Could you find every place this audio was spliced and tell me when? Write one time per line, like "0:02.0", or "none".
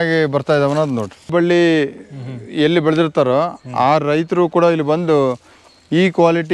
0:01.3

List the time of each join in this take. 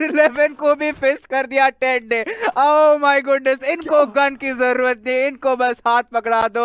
none

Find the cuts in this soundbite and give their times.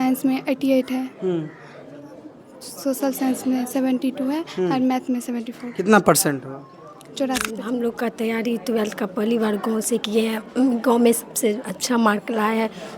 0:07.5

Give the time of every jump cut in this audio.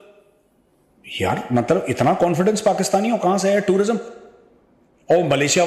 0:04.1

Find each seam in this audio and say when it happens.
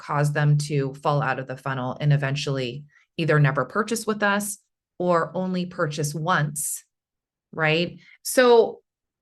0:08.1

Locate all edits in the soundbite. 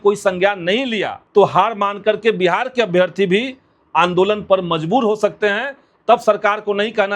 0:01.2

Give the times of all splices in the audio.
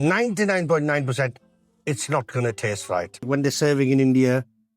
0:03.3

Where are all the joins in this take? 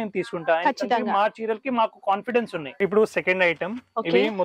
0:02.8

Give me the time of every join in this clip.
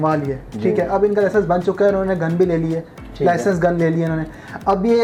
none

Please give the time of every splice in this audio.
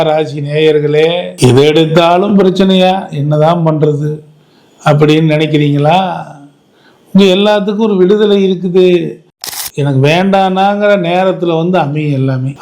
0:09.5

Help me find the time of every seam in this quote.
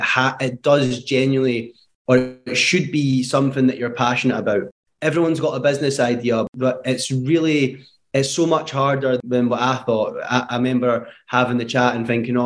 0:06.5
0:09.2

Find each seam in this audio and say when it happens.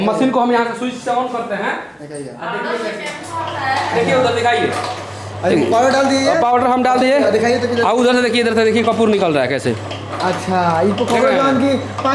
none

